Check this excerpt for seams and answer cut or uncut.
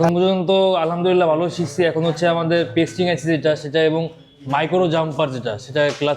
uncut